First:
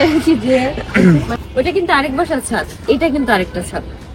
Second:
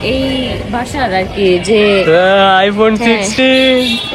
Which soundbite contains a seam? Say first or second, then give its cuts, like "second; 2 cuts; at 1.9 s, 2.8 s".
first; 1 cut; at 1.3 s